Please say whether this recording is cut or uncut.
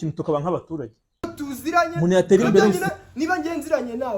cut